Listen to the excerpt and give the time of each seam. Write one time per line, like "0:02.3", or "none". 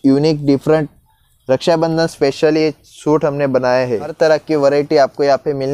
0:04.1